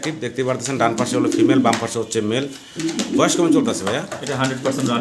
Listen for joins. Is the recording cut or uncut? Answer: uncut